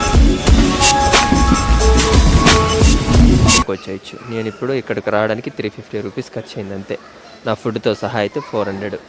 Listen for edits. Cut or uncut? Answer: cut